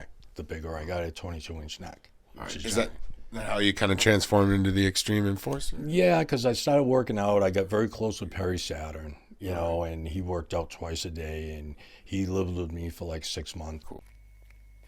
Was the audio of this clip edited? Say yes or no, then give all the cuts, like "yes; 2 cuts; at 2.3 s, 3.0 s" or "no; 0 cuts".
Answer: yes; 1 cut; at 13.8 s